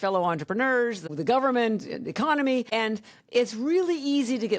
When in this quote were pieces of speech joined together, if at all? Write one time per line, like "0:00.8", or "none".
0:01.0
0:02.7